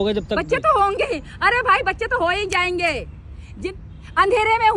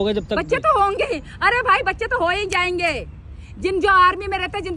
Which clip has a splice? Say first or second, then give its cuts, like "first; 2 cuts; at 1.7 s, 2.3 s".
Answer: first; 1 cut; at 3.6 s